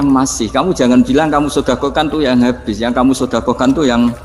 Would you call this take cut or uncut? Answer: uncut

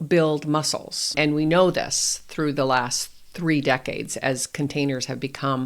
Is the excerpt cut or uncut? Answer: cut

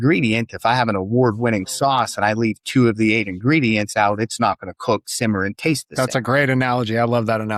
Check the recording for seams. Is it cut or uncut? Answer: uncut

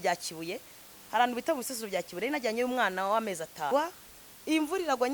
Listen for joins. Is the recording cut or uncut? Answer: cut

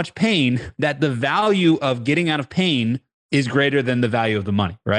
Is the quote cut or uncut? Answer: uncut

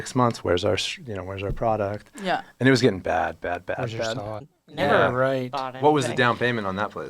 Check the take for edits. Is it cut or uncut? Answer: cut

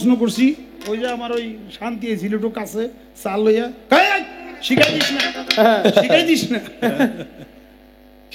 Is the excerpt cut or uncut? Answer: uncut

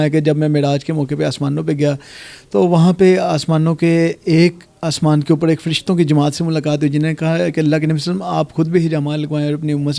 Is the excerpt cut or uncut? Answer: uncut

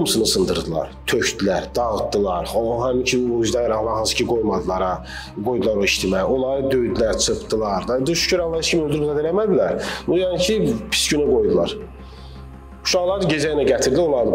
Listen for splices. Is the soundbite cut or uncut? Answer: uncut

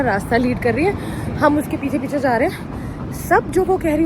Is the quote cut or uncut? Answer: uncut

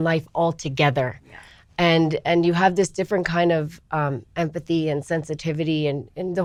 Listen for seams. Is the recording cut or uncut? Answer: uncut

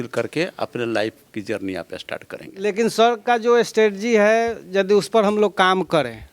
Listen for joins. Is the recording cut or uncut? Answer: cut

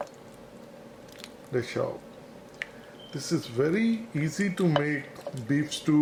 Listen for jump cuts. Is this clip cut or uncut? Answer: uncut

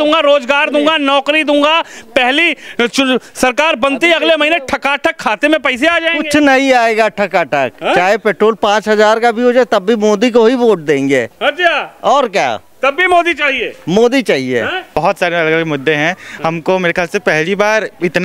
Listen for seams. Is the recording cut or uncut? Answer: cut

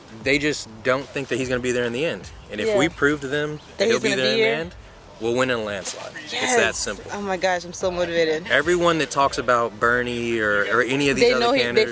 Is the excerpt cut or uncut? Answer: uncut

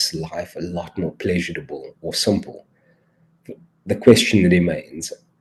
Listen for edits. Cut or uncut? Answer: uncut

